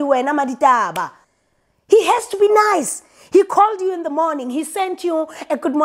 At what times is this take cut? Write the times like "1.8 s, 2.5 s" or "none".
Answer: 1.3 s